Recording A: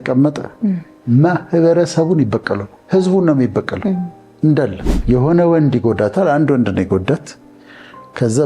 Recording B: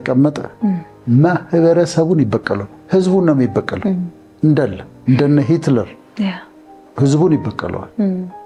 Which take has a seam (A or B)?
A